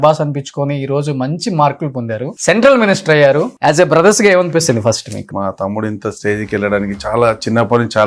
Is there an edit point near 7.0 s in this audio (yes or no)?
no